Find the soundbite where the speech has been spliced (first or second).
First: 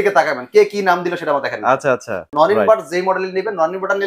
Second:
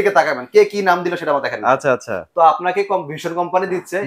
first